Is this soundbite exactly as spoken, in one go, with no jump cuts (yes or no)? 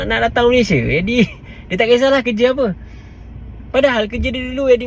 yes